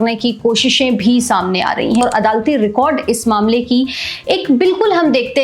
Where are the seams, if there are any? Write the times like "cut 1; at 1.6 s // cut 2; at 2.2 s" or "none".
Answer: cut 1; at 2.0 s